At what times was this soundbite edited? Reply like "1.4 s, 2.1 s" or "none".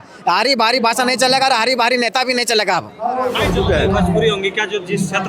3.4 s